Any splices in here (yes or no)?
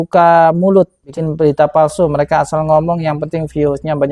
yes